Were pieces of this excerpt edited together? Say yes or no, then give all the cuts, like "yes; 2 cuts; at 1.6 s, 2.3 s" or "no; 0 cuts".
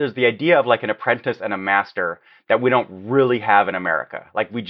no; 0 cuts